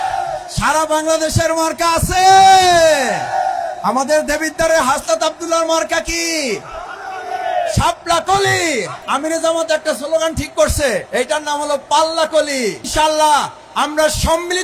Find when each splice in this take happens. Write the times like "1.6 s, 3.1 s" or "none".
9.0 s, 11.1 s, 12.8 s